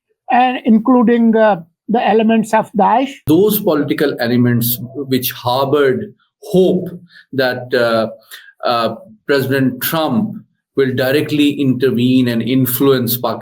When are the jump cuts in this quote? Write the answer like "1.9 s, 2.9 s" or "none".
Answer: 3.2 s